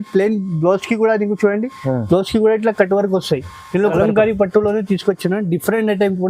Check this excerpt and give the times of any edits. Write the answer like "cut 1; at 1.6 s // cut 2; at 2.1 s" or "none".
cut 1; at 3.9 s